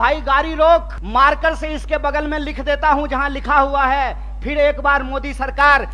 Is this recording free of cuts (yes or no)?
no